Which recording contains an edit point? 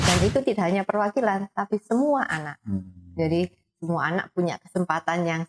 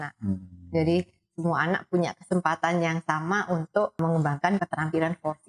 second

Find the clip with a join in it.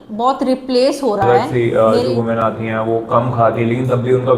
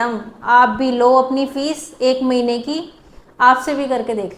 first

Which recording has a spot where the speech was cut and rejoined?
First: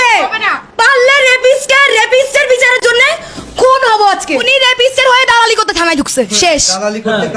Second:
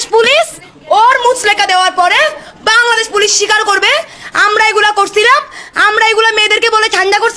first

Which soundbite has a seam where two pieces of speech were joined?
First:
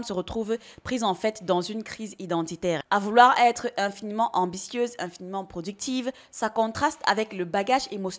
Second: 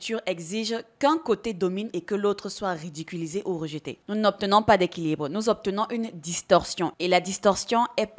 first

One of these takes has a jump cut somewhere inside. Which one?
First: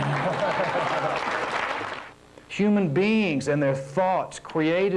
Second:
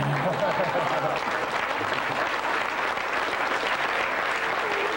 first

